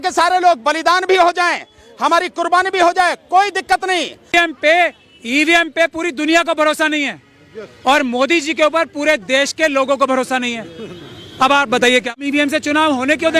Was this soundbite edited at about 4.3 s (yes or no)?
yes